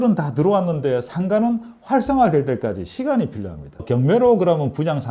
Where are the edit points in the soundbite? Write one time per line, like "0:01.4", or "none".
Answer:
0:03.7